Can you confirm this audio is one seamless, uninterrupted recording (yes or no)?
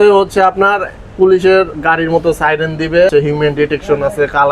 no